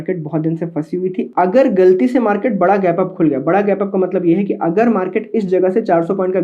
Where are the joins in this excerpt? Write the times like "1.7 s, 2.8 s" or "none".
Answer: 1.2 s